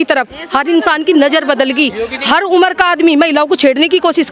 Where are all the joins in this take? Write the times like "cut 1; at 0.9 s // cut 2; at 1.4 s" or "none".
cut 1; at 2.1 s